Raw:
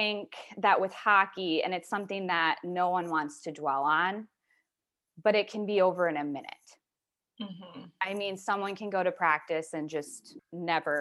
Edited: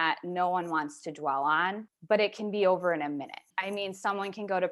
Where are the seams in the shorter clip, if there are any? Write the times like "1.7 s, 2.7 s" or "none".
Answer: 1.9 s, 3.4 s